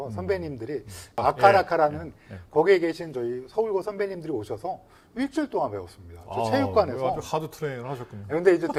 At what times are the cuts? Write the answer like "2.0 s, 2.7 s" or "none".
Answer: none